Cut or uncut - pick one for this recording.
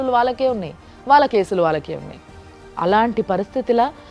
uncut